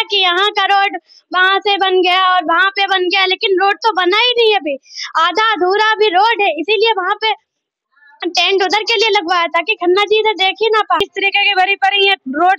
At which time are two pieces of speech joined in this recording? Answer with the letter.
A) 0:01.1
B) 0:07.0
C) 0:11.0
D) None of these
C